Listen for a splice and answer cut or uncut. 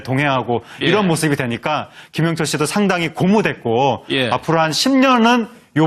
uncut